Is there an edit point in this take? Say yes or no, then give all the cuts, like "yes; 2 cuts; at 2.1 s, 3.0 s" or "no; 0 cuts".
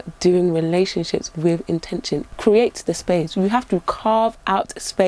yes; 1 cut; at 2.2 s